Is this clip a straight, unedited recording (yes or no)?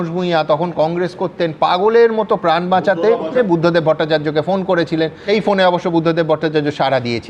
no